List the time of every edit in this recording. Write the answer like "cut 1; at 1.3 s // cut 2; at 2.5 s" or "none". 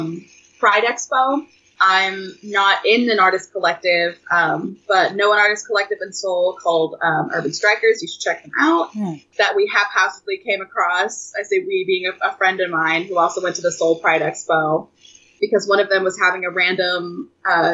cut 1; at 1.6 s // cut 2; at 9.2 s